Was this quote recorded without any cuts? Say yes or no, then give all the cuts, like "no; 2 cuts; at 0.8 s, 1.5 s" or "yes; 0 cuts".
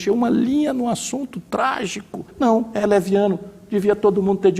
no; 1 cut; at 2.3 s